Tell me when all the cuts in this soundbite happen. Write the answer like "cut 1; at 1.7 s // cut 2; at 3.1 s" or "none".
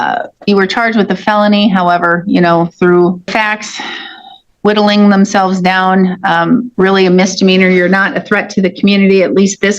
cut 1; at 3.3 s // cut 2; at 6.7 s